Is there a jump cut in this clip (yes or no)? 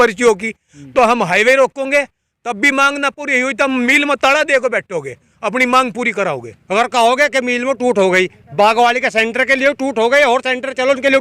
yes